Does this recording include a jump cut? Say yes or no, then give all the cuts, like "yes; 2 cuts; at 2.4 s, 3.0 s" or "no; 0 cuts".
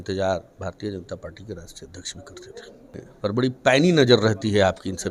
yes; 1 cut; at 3.0 s